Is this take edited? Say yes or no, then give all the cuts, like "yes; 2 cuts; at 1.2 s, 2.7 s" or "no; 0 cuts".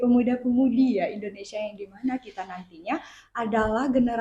no; 0 cuts